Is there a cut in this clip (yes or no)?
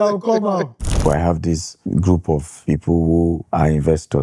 yes